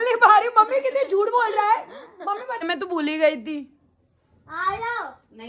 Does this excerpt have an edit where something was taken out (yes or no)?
yes